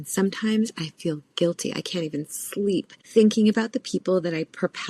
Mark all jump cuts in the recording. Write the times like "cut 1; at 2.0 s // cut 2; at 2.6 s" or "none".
cut 1; at 3.0 s